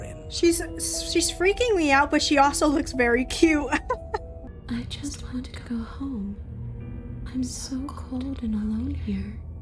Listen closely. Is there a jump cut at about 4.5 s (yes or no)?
yes